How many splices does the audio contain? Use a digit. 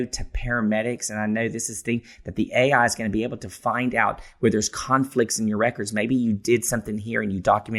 0